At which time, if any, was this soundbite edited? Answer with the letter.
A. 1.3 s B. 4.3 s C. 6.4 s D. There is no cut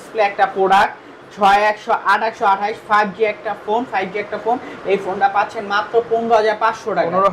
D